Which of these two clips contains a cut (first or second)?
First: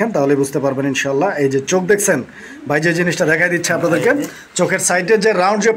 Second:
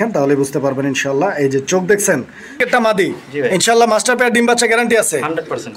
second